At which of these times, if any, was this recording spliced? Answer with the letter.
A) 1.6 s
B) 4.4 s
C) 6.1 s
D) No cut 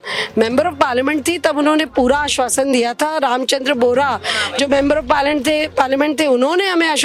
D